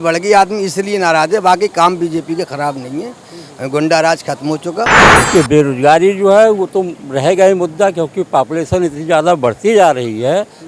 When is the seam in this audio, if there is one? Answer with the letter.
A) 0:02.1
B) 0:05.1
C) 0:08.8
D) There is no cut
B